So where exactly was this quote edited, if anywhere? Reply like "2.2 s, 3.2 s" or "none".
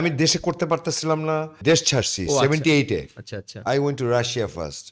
1.6 s